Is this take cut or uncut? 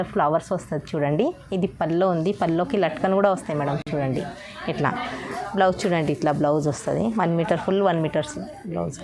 uncut